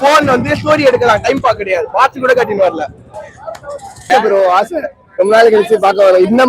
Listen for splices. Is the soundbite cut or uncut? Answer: cut